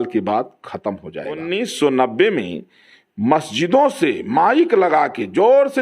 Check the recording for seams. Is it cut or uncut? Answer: cut